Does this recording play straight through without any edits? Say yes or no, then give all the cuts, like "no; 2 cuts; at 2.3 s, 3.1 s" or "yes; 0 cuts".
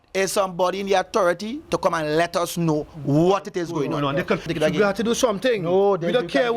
no; 1 cut; at 4.5 s